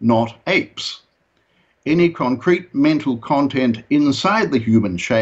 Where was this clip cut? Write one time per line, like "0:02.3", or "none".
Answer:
none